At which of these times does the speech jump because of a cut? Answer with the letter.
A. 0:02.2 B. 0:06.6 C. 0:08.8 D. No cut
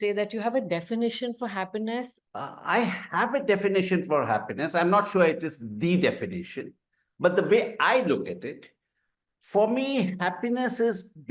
A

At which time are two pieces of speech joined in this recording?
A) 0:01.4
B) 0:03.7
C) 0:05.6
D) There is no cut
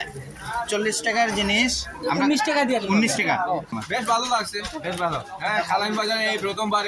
B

